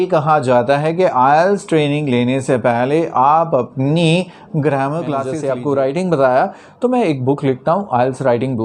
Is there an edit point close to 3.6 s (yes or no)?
no